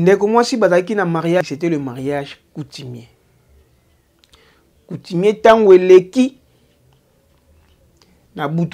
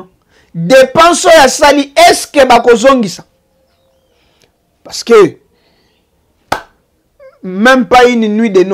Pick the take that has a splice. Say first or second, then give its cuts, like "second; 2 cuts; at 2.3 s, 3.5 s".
first; 1 cut; at 1.4 s